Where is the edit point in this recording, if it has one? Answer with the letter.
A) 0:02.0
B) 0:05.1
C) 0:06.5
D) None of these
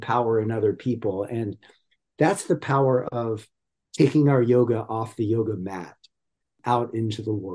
C